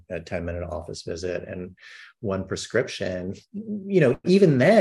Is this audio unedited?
yes; 0 cuts

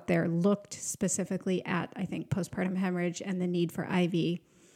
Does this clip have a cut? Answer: no; 0 cuts

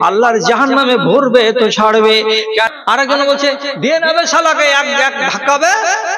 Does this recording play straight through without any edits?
no; 1 cut; at 2.7 s

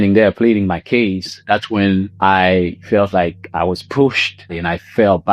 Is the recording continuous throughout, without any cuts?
no; 1 cut; at 4.4 s

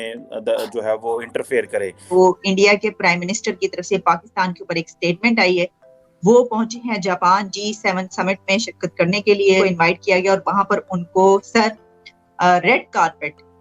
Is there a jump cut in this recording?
yes; 1 cut; at 2.0 s

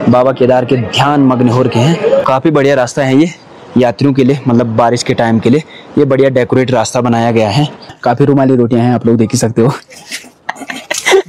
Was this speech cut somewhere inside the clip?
yes; 2 cuts; at 2.2 s, 7.9 s

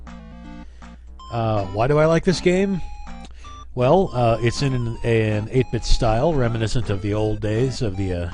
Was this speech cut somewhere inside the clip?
yes; 1 cut; at 4.1 s

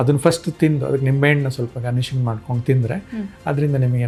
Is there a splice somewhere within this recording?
no; 0 cuts

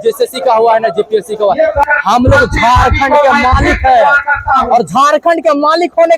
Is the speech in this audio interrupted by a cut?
yes; 1 cut; at 1.8 s

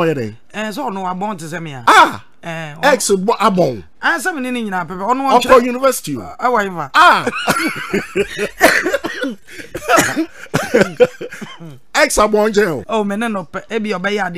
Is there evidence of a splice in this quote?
yes; 3 cuts; at 1.7 s, 6.8 s, 12.8 s

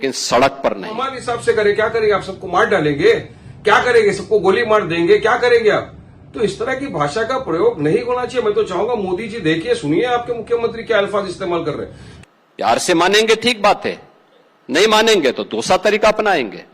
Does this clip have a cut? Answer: yes; 2 cuts; at 1.2 s, 12.0 s

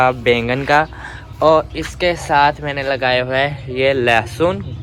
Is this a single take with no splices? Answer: yes; 0 cuts

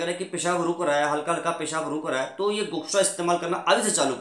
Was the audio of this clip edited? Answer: no; 0 cuts

